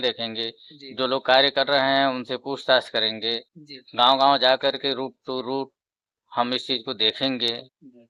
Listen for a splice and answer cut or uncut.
uncut